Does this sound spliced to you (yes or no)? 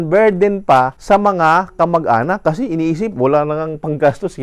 yes